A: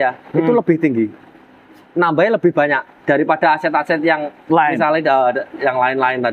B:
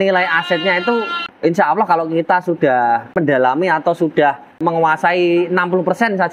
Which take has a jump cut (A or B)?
B